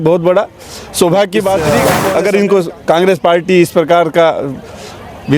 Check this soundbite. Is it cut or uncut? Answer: cut